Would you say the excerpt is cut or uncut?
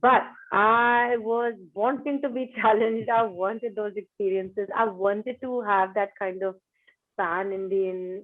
uncut